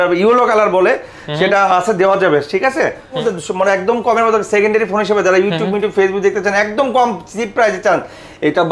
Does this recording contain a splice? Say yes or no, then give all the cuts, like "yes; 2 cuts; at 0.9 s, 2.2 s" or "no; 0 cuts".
yes; 1 cut; at 3.2 s